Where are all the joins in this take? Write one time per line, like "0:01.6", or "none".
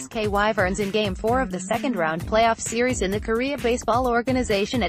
0:01.1